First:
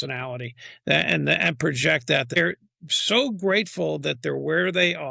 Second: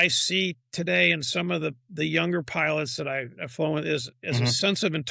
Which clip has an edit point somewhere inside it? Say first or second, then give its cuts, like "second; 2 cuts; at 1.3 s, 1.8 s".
first; 1 cut; at 2.4 s